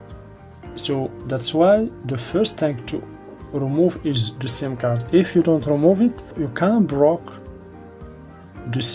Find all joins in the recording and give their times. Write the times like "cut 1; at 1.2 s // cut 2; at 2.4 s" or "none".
cut 1; at 6.4 s